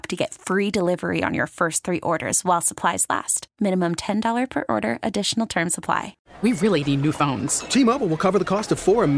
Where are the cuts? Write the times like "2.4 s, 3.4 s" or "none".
6.2 s